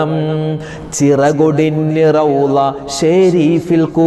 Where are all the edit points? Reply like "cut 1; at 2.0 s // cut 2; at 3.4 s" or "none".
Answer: none